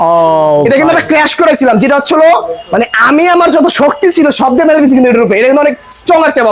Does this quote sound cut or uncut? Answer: uncut